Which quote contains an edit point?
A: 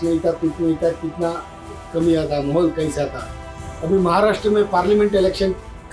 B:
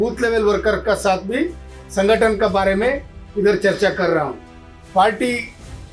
B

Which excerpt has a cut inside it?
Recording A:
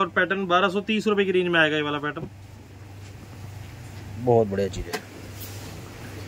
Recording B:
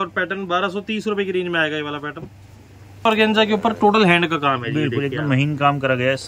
B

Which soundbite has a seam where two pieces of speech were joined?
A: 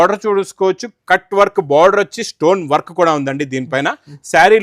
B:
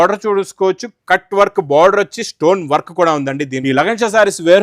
B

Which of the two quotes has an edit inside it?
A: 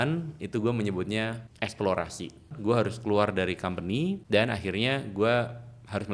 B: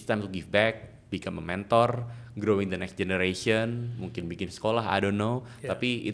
A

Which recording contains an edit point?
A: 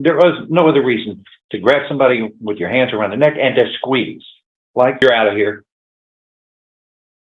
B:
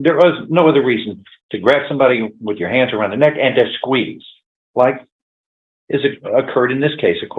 A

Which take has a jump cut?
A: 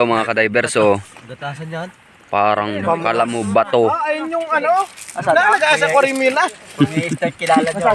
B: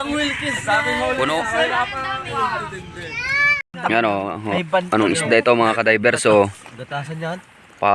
B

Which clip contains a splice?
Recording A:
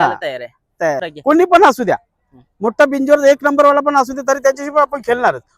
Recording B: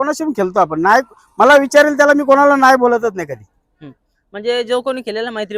A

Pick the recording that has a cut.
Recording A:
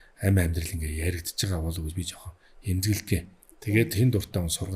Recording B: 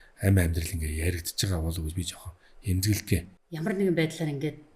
B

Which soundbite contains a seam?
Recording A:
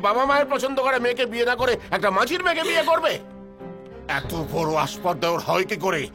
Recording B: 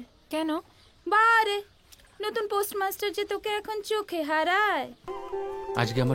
B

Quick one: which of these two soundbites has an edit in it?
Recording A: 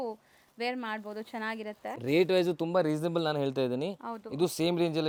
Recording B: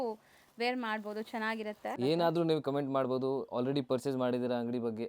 B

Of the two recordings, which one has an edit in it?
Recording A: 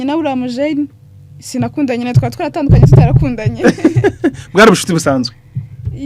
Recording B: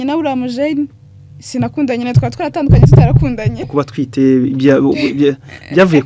B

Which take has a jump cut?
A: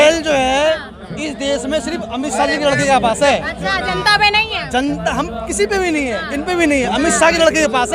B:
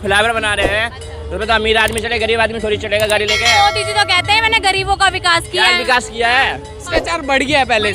B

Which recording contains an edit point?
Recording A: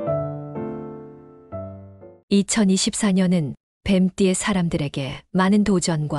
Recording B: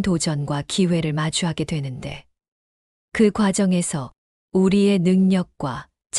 A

